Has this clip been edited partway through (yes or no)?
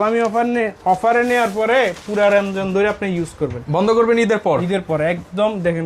no